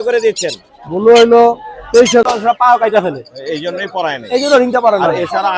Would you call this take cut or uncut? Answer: cut